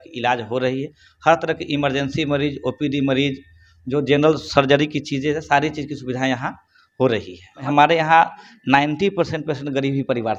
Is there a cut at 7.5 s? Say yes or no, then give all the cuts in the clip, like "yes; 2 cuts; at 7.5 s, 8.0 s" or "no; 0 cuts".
yes; 1 cut; at 7.5 s